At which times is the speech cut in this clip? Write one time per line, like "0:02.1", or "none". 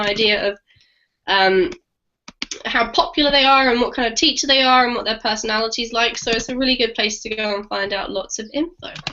0:07.1